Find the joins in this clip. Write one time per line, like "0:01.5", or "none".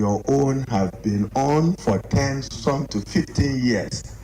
none